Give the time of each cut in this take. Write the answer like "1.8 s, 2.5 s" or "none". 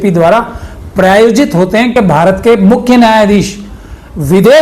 1.9 s